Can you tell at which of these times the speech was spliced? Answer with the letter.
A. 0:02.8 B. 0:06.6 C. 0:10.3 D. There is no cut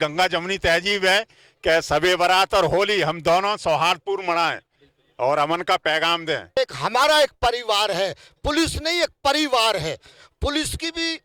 B